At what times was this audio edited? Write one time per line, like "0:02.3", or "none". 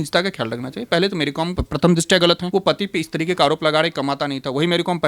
0:01.6
0:02.4

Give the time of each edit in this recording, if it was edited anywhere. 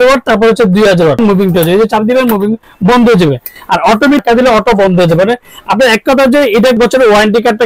0:01.2
0:04.2
0:06.5

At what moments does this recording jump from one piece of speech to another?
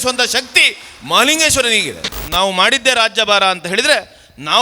0:02.2

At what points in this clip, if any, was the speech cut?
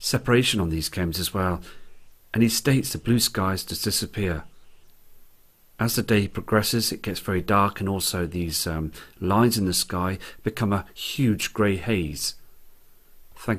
0:03.4

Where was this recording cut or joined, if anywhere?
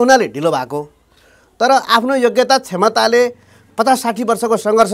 none

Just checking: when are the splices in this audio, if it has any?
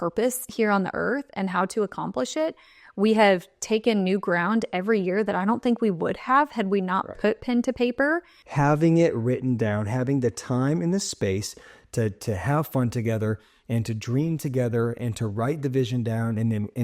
0:08.4

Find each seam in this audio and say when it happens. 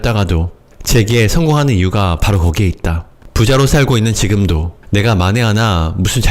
0:03.2
0:04.7

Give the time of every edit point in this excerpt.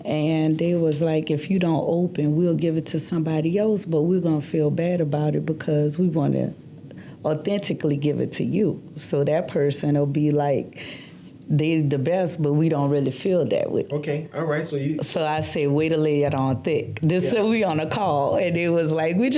none

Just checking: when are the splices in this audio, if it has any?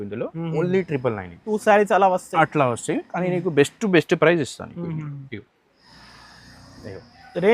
0:01.5

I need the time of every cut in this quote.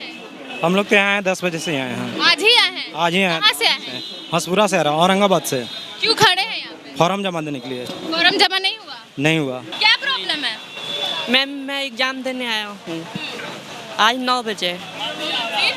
0:09.7

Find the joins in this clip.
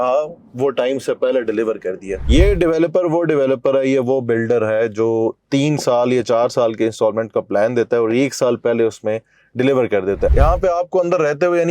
0:02.2
0:10.3

